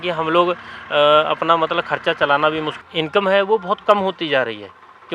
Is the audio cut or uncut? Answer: cut